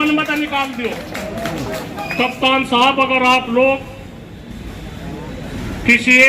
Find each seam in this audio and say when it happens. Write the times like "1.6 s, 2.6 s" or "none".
2.0 s